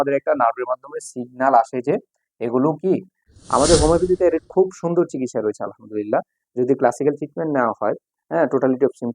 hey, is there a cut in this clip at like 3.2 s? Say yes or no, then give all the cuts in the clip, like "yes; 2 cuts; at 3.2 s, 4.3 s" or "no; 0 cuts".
yes; 1 cut; at 3.2 s